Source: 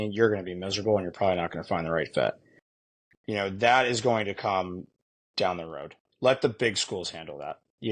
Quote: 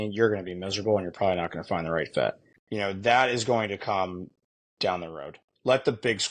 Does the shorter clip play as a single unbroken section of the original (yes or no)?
no